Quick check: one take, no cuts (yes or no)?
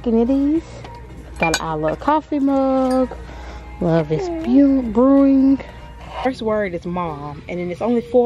no